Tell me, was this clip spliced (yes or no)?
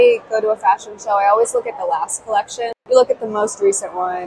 yes